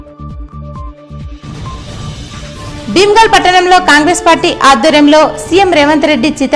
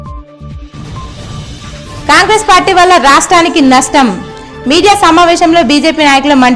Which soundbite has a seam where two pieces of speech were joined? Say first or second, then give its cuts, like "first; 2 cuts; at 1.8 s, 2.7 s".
first; 1 cut; at 2.7 s